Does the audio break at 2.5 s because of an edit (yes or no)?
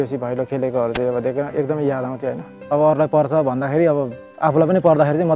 yes